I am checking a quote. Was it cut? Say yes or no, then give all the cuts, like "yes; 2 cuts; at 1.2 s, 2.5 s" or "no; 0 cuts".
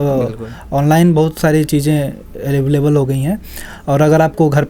no; 0 cuts